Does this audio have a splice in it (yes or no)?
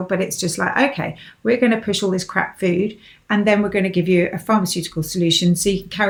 no